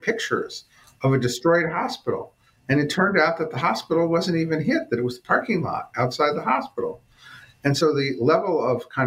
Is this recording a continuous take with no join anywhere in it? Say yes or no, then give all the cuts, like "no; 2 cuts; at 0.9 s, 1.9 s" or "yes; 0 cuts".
no; 1 cut; at 7.8 s